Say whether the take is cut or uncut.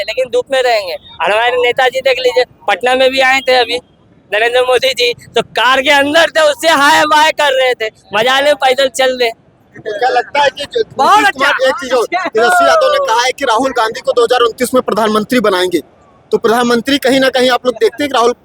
uncut